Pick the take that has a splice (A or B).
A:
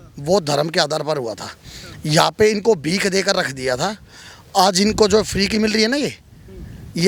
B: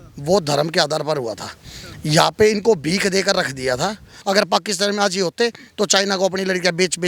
B